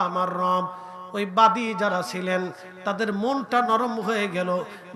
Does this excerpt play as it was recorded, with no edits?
yes; 0 cuts

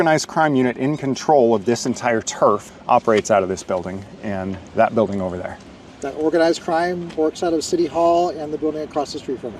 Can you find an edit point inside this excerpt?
no; 0 cuts

